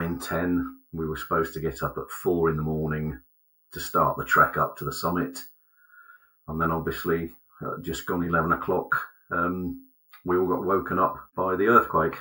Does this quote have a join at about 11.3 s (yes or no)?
yes